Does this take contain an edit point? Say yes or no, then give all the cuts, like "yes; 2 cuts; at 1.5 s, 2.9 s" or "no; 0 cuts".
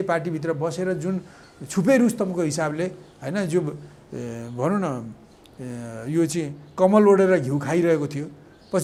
no; 0 cuts